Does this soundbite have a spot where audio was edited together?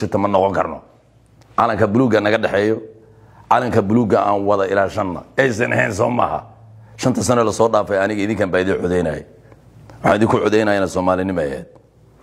no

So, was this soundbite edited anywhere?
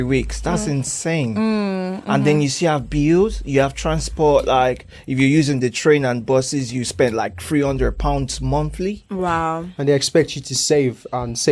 no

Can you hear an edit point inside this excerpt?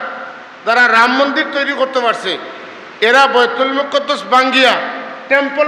no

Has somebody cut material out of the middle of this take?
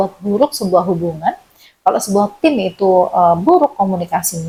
no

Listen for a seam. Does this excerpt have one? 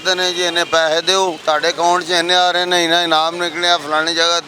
yes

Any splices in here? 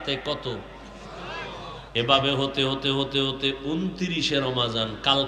no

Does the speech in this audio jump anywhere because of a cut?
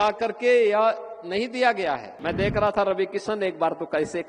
yes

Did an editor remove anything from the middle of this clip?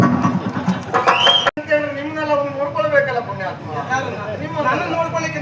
yes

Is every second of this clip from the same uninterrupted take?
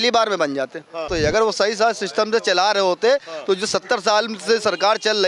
no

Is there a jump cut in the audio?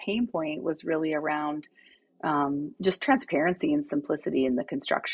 no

